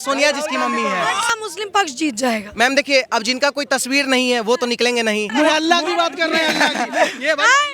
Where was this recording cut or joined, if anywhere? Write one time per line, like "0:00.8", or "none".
0:01.3
0:05.3